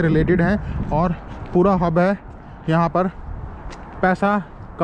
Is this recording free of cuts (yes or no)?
yes